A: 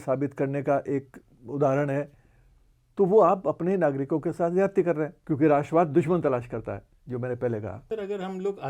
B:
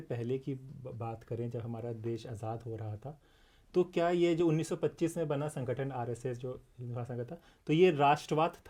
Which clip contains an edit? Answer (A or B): A